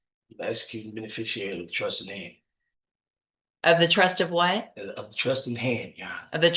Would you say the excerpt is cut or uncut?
uncut